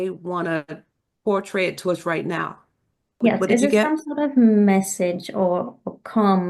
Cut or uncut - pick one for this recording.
cut